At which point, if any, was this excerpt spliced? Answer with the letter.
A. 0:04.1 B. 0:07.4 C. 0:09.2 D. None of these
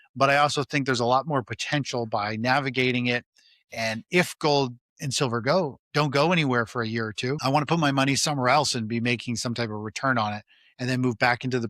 B